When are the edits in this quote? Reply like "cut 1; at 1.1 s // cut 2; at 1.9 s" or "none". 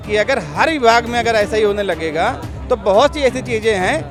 none